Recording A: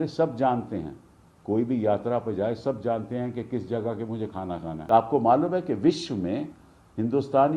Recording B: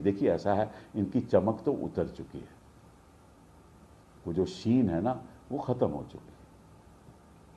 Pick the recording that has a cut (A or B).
A